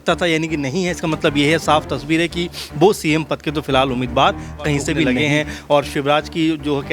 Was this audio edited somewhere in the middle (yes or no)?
yes